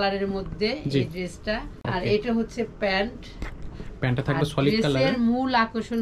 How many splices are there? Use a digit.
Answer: 1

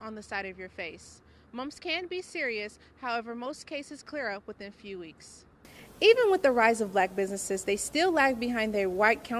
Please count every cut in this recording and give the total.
1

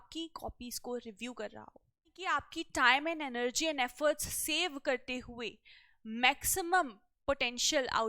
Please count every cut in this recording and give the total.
1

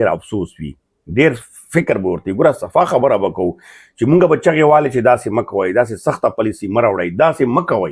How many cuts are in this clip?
0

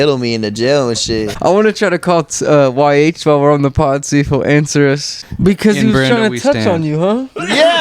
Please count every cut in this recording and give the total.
2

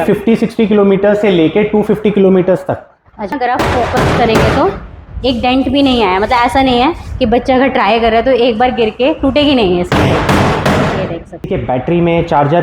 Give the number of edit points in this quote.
2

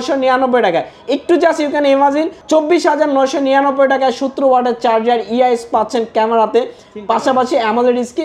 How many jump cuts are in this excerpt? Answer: 1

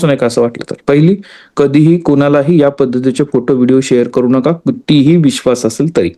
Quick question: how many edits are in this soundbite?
0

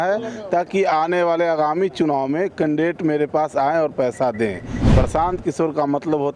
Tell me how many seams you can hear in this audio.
0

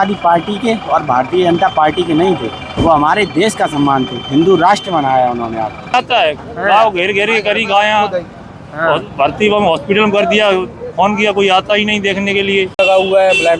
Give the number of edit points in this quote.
2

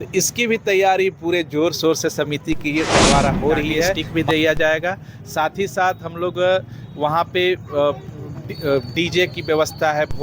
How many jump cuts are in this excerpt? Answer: 1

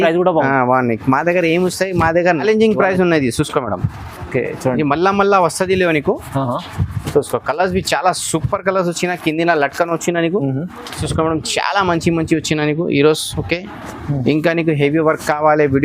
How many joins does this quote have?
2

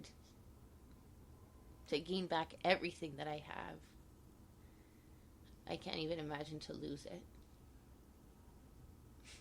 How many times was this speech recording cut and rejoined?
0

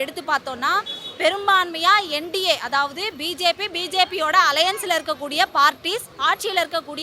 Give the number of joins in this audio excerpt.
1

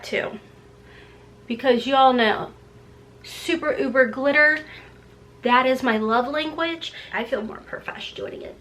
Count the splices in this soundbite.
1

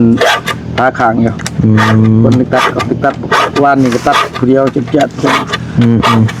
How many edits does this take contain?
0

